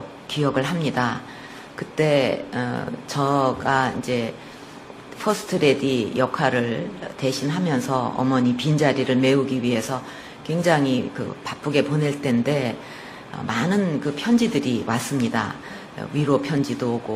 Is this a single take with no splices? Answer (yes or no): yes